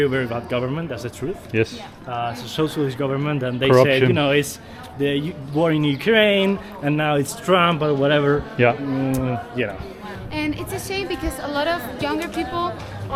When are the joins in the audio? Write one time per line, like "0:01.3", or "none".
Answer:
none